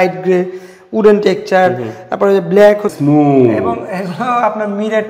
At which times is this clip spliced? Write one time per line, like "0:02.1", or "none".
0:02.9